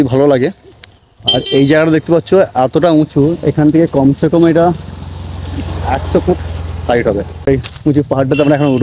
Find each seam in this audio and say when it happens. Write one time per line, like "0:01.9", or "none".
0:07.5